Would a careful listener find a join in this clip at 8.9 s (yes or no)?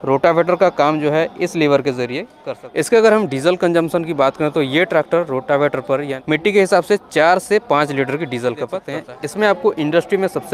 yes